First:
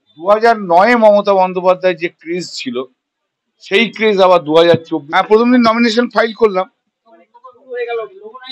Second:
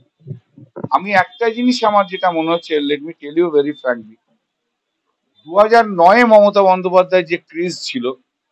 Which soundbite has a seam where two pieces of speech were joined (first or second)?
first